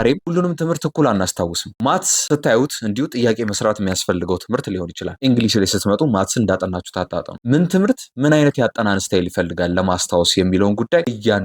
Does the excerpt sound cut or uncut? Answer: uncut